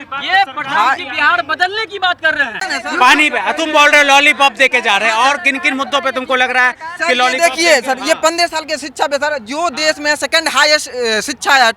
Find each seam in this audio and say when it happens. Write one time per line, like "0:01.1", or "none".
0:02.6